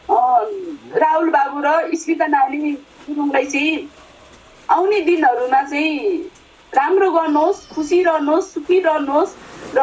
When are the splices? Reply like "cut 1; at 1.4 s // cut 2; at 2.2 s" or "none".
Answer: none